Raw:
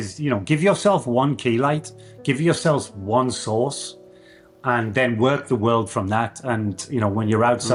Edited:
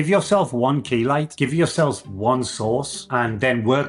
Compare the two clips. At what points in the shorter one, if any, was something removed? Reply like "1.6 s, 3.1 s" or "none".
1.3 s, 3.0 s